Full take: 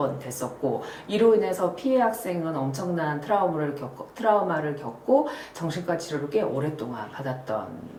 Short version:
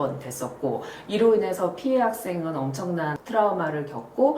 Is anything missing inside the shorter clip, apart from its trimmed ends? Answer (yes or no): yes